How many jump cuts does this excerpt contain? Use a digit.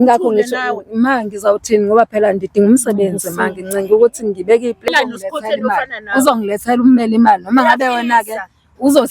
1